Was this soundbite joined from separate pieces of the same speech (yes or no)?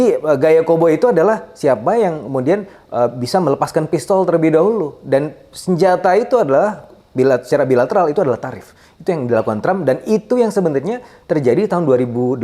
no